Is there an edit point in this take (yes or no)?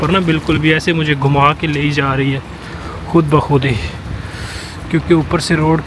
no